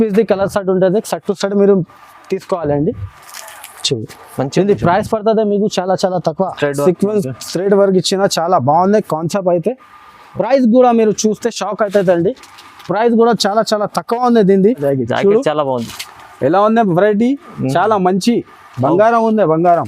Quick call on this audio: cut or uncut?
cut